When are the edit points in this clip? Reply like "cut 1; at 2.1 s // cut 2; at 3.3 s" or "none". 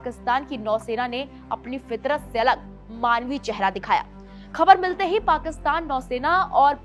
none